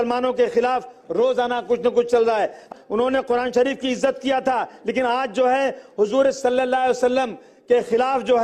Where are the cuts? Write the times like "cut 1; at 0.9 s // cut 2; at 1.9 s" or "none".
cut 1; at 2.7 s